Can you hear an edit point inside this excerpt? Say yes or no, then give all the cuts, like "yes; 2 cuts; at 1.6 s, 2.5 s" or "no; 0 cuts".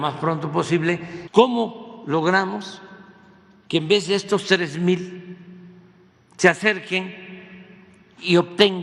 yes; 1 cut; at 1.2 s